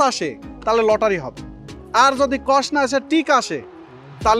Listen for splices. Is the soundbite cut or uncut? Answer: uncut